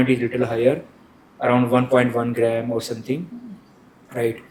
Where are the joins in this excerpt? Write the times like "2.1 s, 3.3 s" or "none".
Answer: none